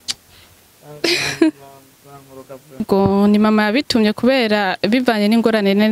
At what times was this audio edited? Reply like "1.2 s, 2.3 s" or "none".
2.8 s